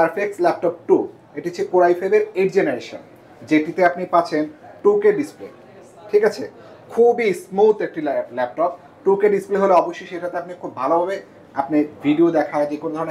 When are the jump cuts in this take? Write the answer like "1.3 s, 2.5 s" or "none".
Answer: none

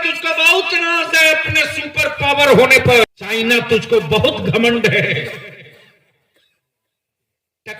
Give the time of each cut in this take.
3.0 s

